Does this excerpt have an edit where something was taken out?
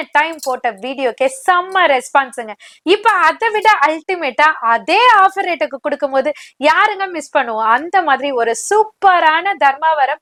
no; 0 cuts

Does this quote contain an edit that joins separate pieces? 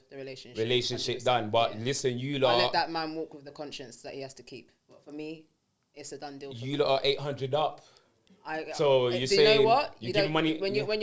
no; 0 cuts

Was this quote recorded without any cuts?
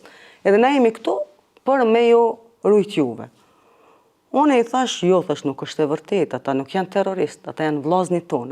yes; 0 cuts

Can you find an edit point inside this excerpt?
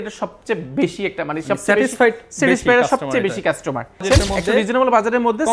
yes; 1 cut; at 4.0 s

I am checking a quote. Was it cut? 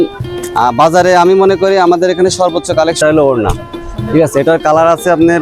yes; 1 cut; at 3.0 s

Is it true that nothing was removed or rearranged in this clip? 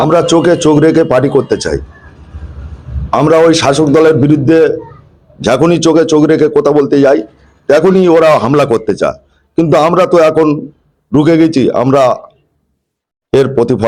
yes; 0 cuts

